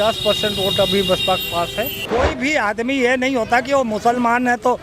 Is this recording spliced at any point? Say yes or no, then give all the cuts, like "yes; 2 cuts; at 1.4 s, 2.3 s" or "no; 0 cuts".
yes; 1 cut; at 2.0 s